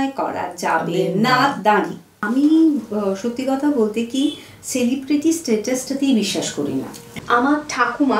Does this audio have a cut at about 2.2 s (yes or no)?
yes